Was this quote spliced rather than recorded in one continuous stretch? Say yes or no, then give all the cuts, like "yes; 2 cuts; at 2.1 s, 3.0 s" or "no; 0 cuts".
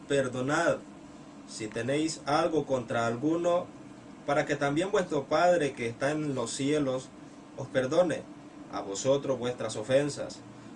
no; 0 cuts